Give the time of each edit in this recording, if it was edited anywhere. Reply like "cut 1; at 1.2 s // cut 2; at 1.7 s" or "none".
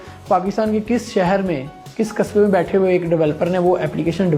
none